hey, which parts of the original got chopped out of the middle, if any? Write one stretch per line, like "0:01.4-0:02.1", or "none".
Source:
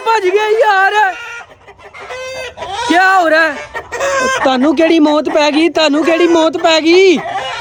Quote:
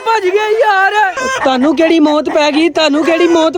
0:01.3-0:04.3

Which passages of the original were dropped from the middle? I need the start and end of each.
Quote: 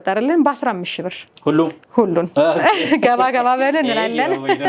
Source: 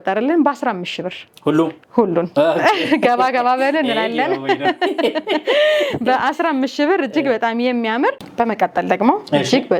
none

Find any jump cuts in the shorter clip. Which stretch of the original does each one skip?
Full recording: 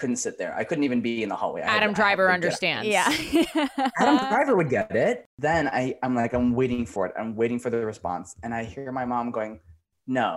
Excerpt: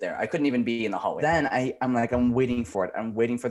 0:01.5-0:05.4

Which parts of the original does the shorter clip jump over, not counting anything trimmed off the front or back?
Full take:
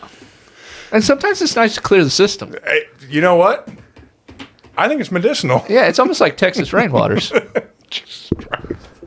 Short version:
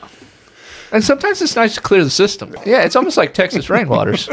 0:02.6-0:05.6

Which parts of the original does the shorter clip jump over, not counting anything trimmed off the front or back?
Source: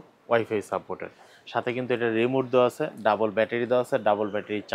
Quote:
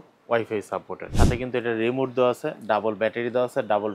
0:01.0-0:01.3

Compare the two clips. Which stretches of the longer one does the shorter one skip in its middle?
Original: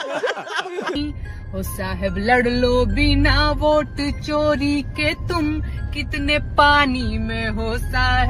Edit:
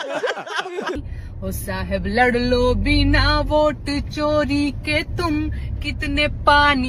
0:00.9-0:01.1

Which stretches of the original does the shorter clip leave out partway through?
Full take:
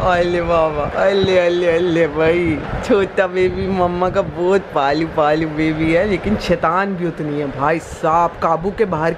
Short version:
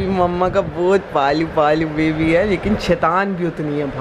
none

